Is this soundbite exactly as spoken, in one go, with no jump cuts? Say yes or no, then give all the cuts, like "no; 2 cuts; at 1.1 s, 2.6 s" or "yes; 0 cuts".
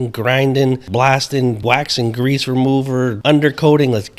no; 3 cuts; at 0.8 s, 1.6 s, 3.2 s